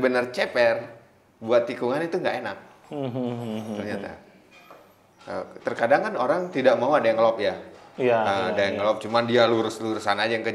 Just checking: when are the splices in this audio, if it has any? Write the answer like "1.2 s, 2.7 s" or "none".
4.7 s